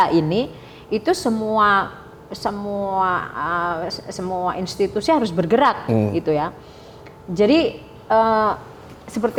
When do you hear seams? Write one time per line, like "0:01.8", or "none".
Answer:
none